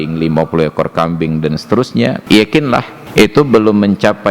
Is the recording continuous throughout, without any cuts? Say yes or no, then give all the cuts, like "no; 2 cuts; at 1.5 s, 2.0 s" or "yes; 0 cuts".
no; 2 cuts; at 2.2 s, 3.0 s